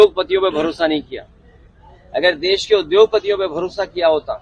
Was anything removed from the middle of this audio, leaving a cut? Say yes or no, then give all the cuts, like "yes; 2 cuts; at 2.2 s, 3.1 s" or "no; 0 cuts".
no; 0 cuts